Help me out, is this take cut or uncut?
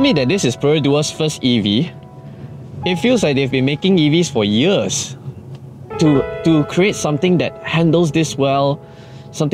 uncut